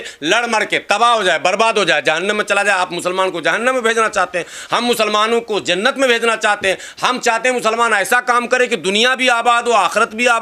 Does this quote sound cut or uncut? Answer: uncut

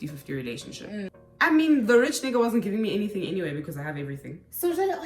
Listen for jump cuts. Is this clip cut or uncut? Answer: cut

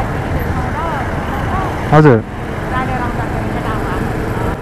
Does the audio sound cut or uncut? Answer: uncut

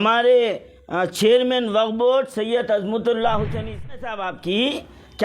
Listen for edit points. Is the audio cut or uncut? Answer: cut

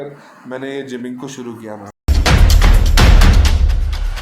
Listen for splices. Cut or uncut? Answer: cut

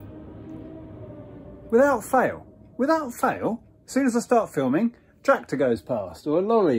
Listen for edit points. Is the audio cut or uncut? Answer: uncut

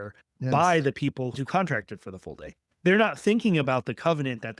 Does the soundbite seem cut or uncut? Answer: cut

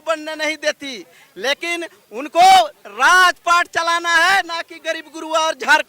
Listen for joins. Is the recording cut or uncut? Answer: uncut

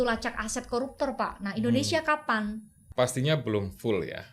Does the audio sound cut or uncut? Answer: cut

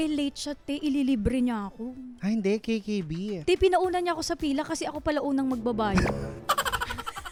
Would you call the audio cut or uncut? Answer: uncut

